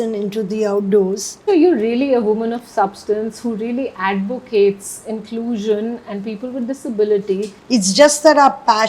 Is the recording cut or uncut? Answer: cut